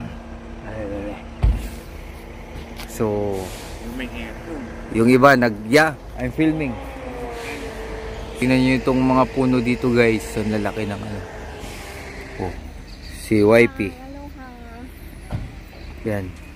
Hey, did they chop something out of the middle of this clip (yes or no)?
yes